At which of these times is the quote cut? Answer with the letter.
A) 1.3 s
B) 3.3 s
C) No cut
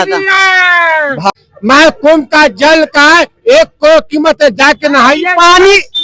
A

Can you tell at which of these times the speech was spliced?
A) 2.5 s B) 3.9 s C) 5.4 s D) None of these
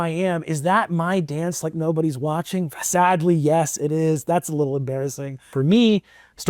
C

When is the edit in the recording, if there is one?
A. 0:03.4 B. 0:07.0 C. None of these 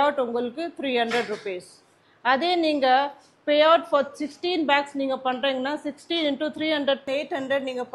B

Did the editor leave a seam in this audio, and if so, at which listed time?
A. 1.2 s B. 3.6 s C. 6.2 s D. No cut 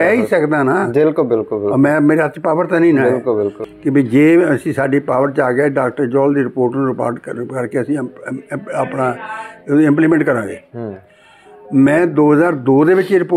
B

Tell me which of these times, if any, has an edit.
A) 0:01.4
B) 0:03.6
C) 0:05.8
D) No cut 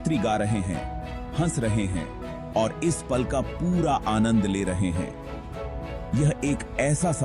D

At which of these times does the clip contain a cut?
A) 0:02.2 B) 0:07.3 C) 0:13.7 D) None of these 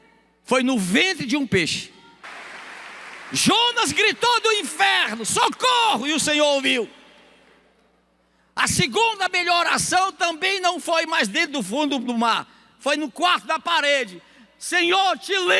A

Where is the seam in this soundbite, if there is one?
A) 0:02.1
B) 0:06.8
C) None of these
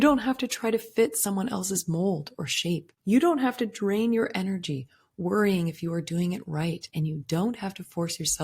B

